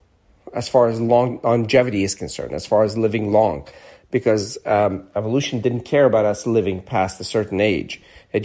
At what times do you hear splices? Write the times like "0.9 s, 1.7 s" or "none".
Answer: none